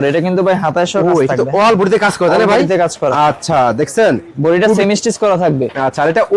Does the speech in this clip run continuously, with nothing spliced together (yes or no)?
yes